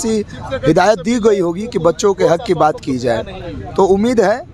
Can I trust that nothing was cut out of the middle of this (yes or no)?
yes